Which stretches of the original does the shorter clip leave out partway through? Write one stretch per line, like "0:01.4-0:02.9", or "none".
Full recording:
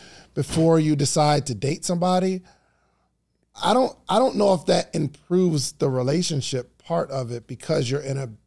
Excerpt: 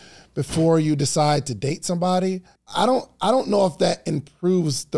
0:02.5-0:03.4